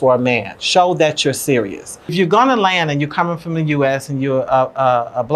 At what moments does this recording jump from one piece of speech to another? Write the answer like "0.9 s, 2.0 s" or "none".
2.0 s